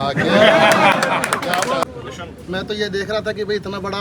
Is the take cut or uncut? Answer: cut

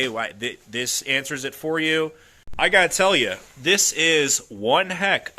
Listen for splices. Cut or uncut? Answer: cut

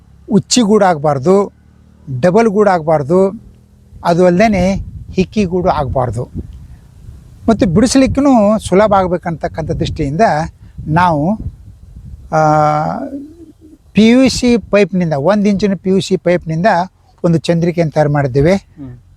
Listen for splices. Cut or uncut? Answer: uncut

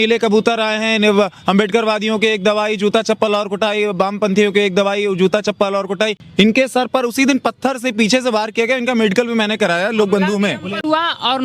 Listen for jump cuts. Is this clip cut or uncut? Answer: cut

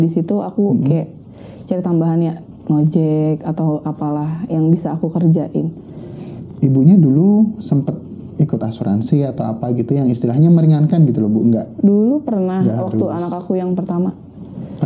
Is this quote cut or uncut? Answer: cut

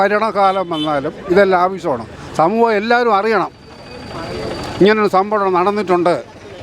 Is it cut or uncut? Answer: uncut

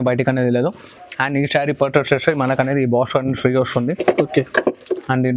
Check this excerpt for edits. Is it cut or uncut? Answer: uncut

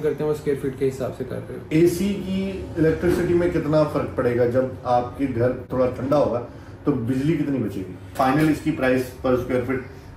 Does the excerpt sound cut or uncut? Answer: cut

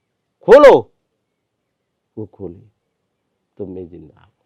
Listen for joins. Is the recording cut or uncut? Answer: uncut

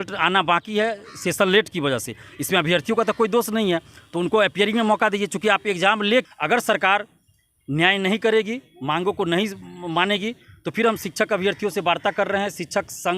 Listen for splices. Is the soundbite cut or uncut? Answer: cut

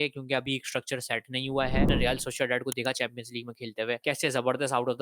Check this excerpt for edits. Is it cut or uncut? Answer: cut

